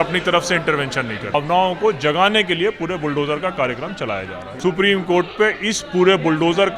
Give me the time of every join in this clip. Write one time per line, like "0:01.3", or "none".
0:01.3
0:04.4